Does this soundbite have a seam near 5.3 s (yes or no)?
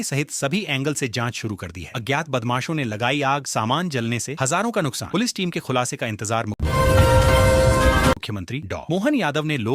no